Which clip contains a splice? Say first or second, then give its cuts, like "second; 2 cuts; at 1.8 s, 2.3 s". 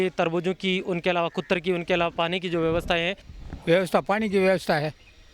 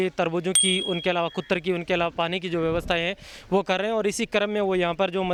first; 1 cut; at 3.3 s